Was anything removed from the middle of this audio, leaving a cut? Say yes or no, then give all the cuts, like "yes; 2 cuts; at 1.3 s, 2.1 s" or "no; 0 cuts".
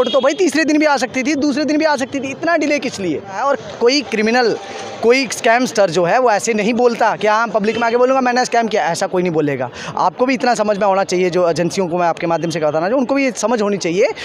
yes; 1 cut; at 3.4 s